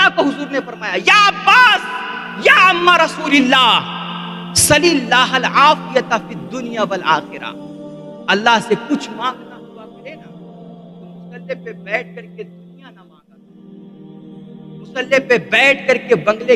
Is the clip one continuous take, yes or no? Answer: yes